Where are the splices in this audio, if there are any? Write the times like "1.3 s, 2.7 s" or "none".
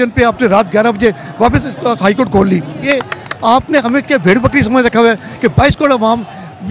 2.9 s